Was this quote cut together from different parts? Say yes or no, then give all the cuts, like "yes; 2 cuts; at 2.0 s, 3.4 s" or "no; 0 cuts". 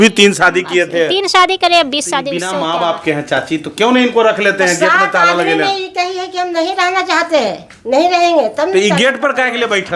yes; 1 cut; at 2.4 s